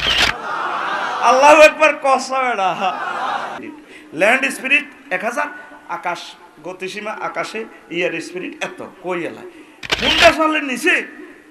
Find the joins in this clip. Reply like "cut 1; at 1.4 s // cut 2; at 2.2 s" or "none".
cut 1; at 3.6 s